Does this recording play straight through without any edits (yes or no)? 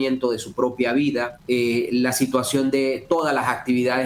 no